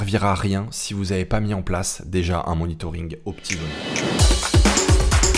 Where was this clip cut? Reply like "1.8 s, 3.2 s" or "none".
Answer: 3.8 s